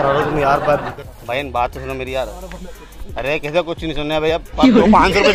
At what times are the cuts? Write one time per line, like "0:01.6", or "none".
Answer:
0:00.9